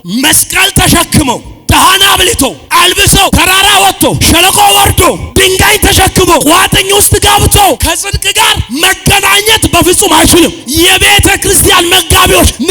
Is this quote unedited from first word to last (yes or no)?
no